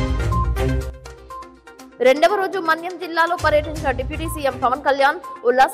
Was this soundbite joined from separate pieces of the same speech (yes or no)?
yes